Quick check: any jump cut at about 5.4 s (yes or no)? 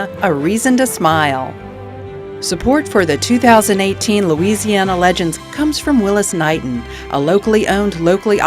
yes